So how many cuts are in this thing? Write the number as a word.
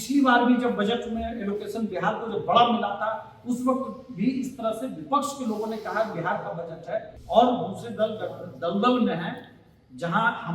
one